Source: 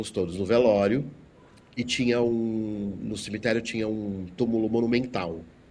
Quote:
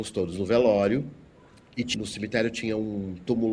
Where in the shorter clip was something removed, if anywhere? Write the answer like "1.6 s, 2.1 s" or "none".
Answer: 1.9 s

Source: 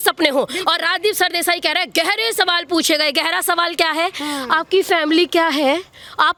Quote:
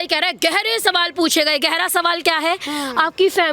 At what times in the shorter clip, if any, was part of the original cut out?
none

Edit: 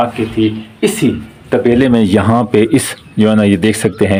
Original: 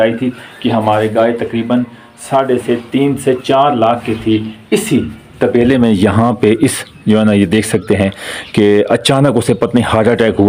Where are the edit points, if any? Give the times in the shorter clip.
none

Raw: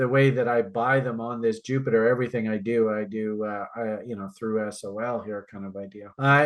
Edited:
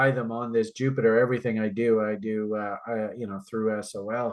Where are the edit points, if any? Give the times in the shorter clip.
none

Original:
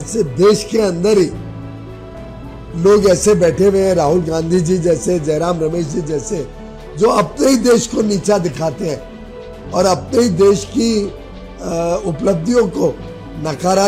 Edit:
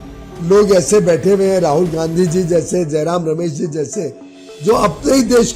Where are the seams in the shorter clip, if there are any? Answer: none

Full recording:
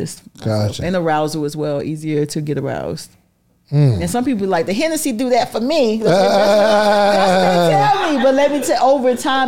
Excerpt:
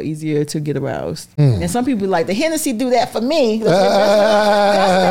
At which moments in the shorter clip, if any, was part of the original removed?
1.4 s

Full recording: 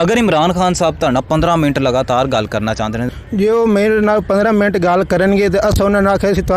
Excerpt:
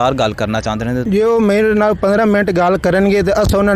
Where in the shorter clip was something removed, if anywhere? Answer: 1.0 s

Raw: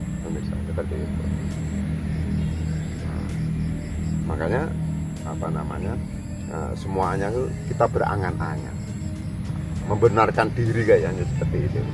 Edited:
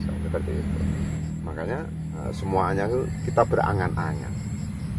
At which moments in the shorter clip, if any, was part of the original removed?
1.2 s, 2.2 s

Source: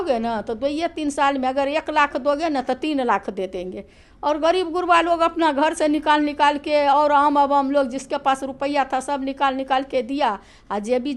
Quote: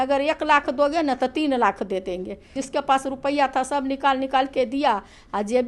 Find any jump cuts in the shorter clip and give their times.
2.6 s

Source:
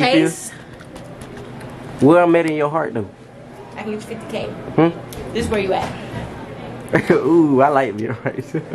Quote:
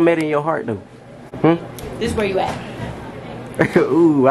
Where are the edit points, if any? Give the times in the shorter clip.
1.2 s

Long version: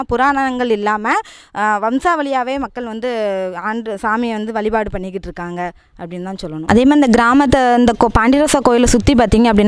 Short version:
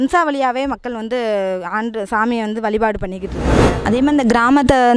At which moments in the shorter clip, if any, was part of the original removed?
3.7 s

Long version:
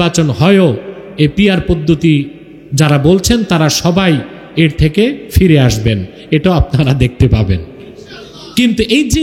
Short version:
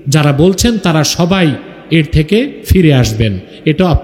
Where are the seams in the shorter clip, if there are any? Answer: none

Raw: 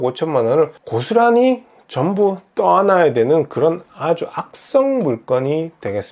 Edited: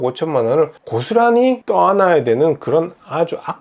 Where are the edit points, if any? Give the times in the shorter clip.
1.6 s

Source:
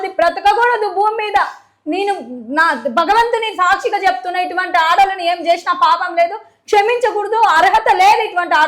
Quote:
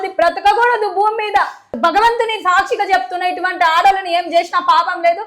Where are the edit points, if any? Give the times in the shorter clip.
1.7 s

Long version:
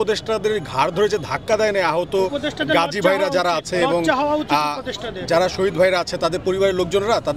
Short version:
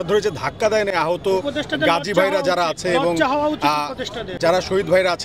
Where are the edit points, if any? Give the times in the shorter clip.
none

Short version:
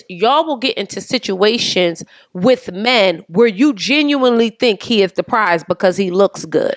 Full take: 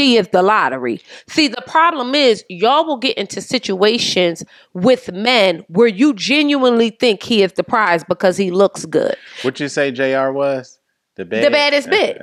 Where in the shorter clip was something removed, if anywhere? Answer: none

